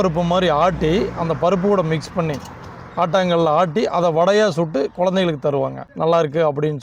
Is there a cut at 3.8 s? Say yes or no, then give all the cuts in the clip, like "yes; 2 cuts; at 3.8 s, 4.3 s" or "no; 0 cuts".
no; 1 cut; at 5.8 s